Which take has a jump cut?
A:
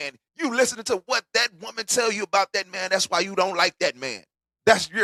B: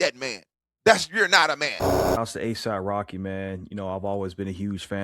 B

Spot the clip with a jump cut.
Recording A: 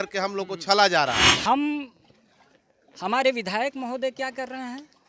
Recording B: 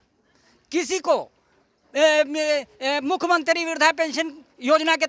A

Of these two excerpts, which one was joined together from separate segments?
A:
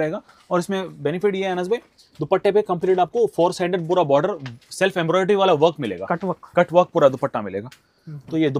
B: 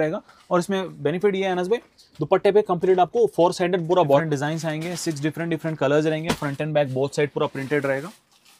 B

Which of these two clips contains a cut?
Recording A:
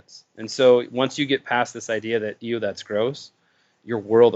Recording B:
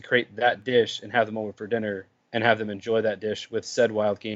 B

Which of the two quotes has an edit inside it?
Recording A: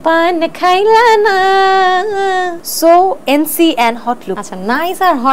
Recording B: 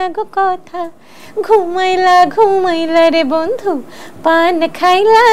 A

